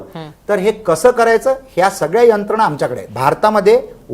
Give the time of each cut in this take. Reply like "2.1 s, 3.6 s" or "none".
3.0 s